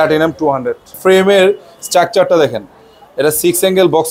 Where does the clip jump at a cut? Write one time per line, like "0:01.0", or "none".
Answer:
0:01.0